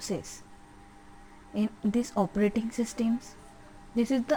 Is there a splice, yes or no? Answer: no